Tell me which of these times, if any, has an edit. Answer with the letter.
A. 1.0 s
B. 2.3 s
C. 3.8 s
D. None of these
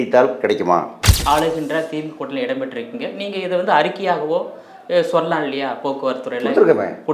A